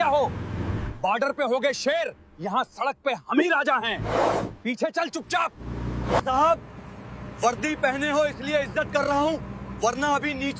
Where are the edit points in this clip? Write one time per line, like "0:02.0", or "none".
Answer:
none